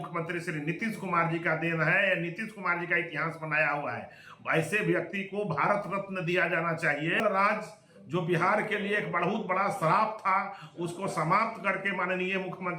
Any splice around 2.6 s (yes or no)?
no